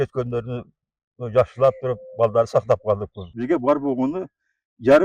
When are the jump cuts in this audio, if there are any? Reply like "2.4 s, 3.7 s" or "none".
3.3 s